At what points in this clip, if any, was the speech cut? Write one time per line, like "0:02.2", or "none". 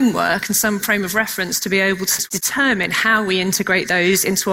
0:02.1